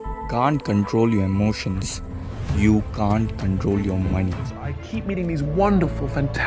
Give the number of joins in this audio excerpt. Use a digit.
1